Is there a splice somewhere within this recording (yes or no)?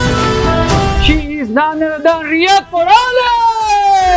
yes